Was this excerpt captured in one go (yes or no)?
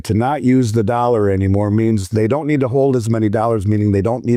yes